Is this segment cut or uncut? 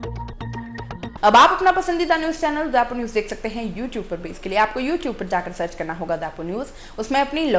uncut